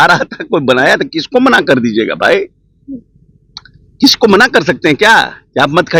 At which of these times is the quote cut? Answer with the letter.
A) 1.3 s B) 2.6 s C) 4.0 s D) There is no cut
D